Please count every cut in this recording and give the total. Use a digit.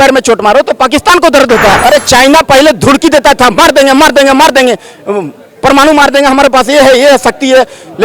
1